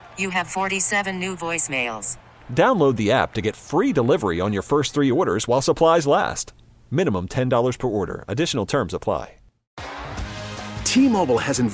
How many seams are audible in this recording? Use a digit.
1